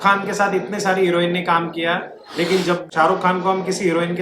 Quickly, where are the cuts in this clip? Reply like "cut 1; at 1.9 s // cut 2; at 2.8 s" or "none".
cut 1; at 2.8 s

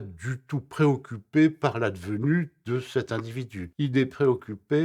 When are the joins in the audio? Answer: cut 1; at 3.6 s

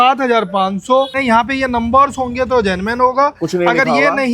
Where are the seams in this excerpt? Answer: cut 1; at 1.2 s

